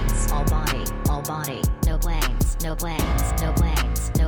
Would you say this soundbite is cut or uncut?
uncut